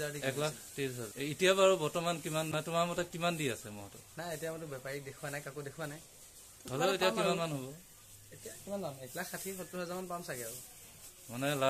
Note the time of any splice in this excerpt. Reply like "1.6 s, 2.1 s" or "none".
1.0 s, 2.5 s